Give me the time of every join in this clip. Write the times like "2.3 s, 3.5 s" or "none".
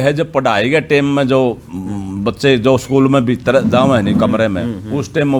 none